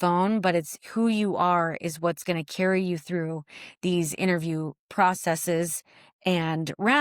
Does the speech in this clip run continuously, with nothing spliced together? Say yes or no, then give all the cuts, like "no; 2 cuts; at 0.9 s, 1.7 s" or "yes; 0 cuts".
yes; 0 cuts